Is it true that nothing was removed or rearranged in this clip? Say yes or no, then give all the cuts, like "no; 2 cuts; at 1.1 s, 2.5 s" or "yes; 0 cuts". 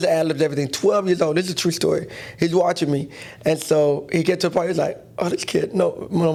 yes; 0 cuts